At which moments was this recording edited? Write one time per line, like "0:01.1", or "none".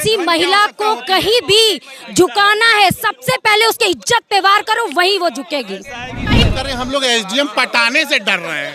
0:06.4